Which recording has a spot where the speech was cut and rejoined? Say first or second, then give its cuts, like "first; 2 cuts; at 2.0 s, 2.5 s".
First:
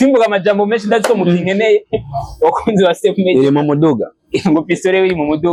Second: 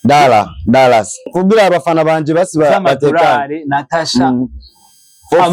second; 1 cut; at 1.2 s